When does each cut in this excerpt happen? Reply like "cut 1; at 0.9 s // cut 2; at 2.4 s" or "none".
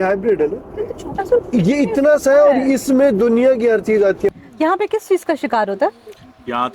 cut 1; at 4.3 s